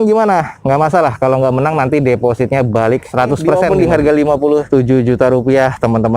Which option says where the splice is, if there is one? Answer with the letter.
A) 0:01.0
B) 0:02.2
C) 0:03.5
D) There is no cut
C